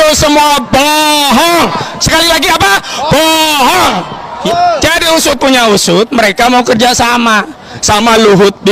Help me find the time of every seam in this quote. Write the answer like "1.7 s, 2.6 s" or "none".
4.3 s